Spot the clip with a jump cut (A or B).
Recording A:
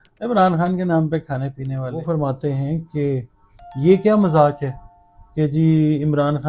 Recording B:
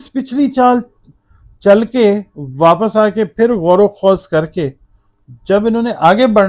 A